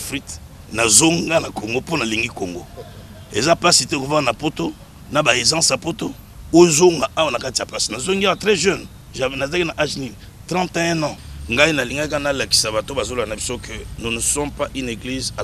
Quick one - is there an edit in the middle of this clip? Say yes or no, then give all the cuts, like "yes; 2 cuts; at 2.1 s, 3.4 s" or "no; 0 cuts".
yes; 1 cut; at 11.3 s